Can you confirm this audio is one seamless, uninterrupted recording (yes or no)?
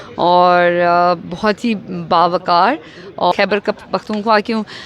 no